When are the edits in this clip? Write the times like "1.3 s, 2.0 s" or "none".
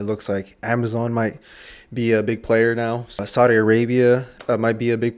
3.2 s